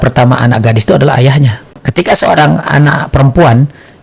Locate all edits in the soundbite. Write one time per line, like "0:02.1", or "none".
0:01.6